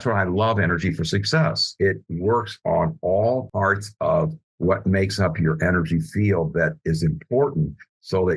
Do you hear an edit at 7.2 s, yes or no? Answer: no